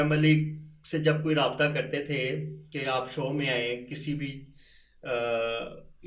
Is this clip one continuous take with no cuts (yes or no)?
yes